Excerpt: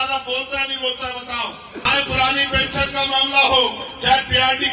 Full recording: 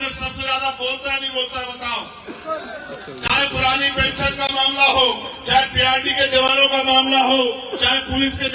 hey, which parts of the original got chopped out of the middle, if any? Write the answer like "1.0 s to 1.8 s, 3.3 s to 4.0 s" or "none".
2.4 s to 3.3 s